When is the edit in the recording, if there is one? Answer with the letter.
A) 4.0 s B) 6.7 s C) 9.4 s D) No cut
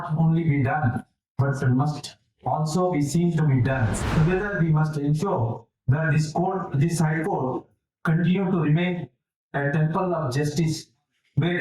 A